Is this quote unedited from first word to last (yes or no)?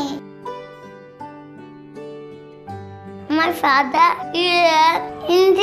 yes